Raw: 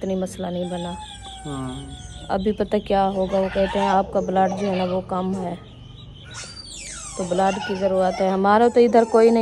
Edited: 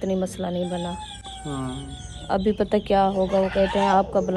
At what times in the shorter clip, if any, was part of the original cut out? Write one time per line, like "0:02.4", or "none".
none